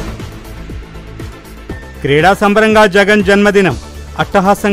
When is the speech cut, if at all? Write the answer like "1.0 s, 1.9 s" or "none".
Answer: none